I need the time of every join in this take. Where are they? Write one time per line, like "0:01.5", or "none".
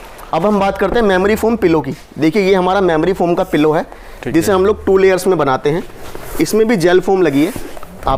none